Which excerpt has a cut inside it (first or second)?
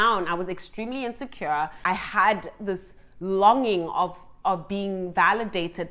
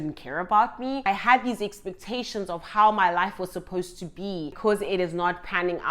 second